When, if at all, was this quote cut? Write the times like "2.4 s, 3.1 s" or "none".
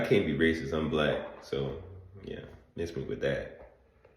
none